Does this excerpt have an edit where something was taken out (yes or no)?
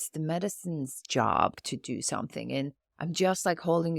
yes